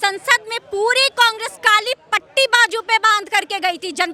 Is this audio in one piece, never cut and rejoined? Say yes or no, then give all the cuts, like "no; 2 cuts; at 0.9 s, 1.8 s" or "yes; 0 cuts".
yes; 0 cuts